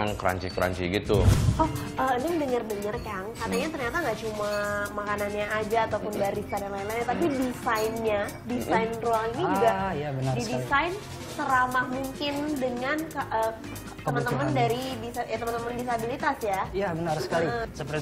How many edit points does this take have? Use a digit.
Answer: 1